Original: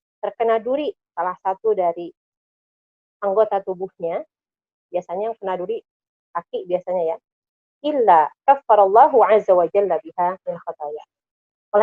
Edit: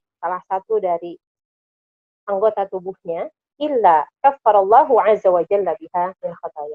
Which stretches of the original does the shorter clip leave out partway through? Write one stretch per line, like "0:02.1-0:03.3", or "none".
0:04.3-0:07.6